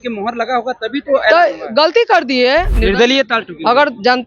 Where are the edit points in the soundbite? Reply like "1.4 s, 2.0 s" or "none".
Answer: 2.8 s